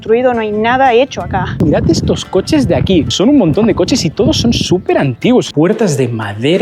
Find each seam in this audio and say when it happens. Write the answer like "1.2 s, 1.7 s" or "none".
1.6 s, 3.1 s, 5.5 s

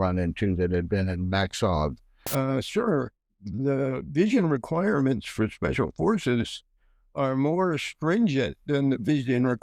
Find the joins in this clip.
2.3 s

